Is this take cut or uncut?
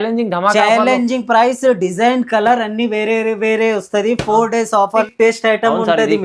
cut